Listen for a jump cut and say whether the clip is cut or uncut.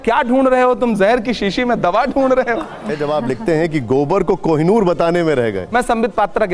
cut